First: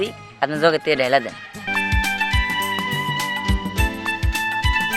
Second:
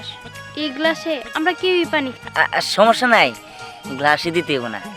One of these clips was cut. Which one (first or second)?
first